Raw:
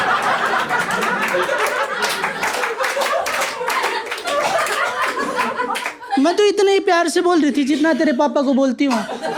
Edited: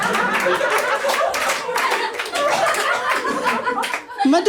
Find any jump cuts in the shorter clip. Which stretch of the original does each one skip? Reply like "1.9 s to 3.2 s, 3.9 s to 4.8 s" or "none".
1.9 s to 2.9 s